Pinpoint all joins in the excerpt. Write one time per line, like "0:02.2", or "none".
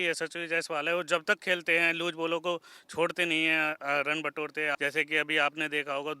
0:04.8

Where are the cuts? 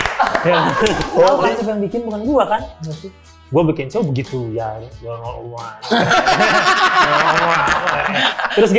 0:01.3

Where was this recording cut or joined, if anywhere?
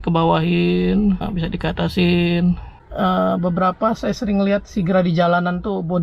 0:02.8

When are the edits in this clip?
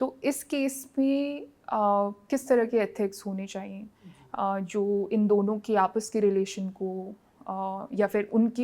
none

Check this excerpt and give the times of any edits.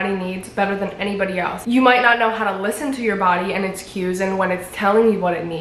0:01.6

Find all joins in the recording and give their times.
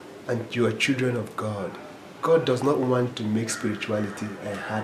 none

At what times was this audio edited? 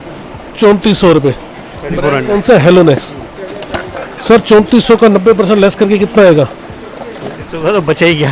none

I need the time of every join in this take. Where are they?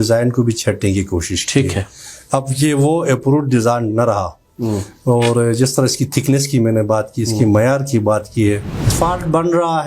0:08.9

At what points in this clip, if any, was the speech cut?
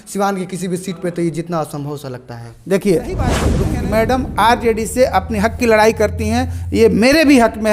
0:03.5

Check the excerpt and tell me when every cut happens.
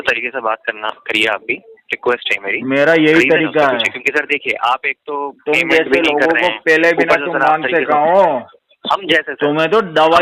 none

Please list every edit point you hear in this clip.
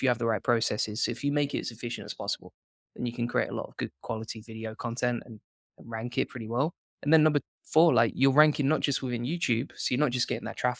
none

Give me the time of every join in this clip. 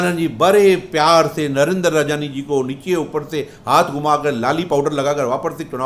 none

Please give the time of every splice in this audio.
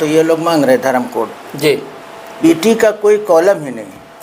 0:02.2

